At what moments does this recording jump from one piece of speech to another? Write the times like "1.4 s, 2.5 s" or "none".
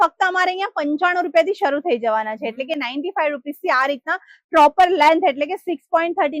none